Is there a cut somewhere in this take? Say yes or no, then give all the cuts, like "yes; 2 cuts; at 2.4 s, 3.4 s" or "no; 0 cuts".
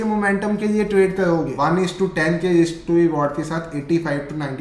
yes; 1 cut; at 1.5 s